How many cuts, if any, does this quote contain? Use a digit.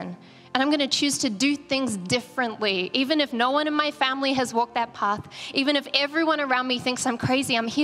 0